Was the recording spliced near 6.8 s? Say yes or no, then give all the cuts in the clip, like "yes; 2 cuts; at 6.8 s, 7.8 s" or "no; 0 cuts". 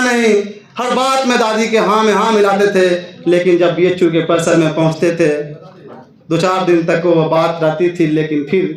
no; 0 cuts